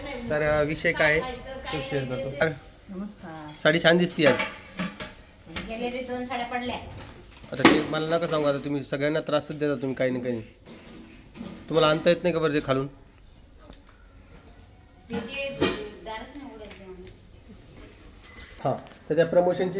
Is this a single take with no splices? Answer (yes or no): no